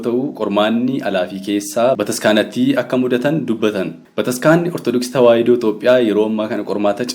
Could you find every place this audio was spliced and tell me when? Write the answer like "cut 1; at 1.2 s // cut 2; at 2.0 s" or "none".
cut 1; at 2.0 s // cut 2; at 4.0 s